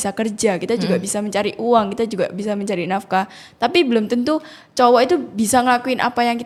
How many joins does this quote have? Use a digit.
0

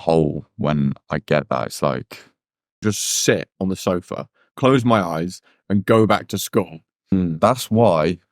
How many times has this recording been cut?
2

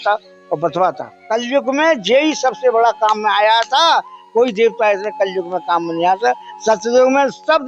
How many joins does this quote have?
1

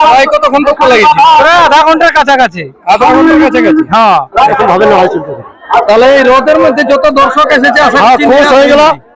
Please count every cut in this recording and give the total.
1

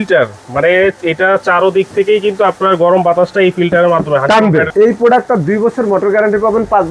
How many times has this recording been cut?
1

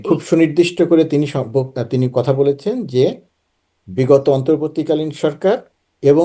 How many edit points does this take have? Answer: 0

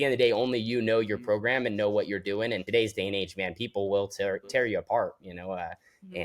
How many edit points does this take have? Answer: 1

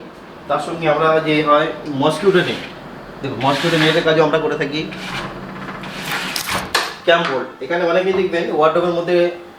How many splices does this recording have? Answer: 1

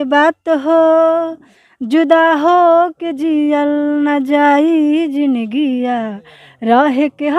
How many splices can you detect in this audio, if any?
0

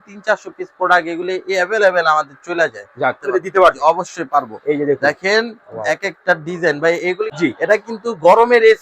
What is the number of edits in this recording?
2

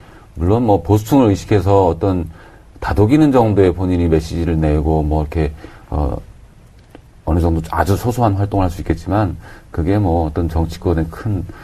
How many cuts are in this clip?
1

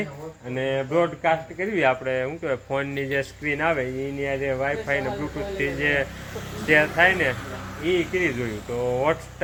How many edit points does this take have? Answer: 0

